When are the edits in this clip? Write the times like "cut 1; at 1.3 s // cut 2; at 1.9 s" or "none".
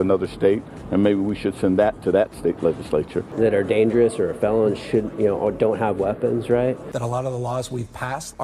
cut 1; at 3.4 s // cut 2; at 6.9 s